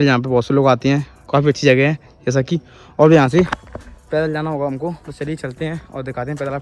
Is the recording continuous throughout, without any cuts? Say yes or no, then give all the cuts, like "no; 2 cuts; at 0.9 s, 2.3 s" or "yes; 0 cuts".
yes; 0 cuts